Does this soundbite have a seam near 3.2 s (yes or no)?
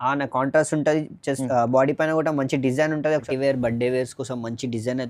yes